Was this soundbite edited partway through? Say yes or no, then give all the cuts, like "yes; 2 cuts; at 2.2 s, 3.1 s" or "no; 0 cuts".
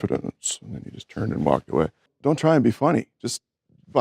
yes; 1 cut; at 2.0 s